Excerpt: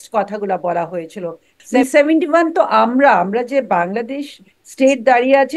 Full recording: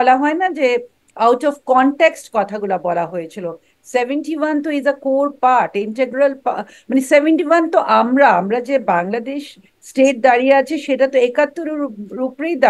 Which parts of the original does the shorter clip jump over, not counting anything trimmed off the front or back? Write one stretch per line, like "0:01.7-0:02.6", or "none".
0:03.8-0:06.8